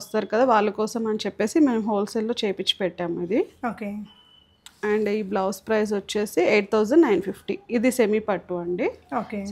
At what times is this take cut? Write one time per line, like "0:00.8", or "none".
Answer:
none